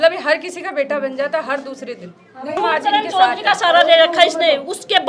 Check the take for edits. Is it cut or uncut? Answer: cut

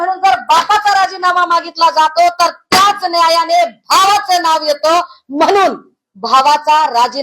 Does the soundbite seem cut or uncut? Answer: uncut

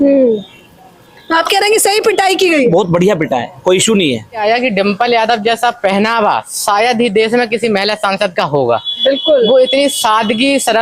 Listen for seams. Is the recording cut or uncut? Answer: cut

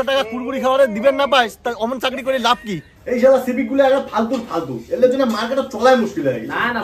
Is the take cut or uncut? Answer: cut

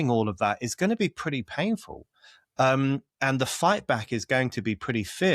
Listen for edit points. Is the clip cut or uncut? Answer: uncut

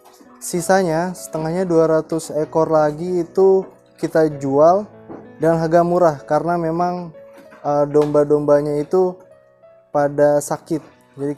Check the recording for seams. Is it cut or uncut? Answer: uncut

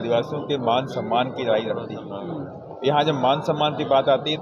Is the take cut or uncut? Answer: uncut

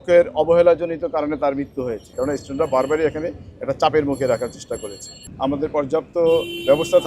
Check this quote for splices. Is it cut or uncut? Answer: cut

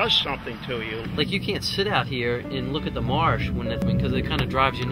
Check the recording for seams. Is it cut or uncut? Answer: cut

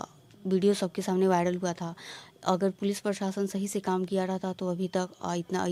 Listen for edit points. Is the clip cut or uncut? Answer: uncut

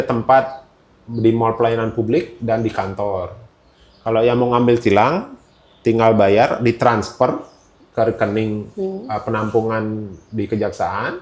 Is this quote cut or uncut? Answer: uncut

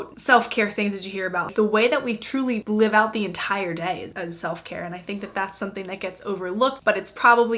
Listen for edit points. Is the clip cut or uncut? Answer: cut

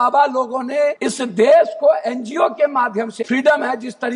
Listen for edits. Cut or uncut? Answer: cut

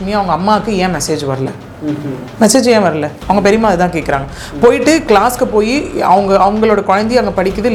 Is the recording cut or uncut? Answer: uncut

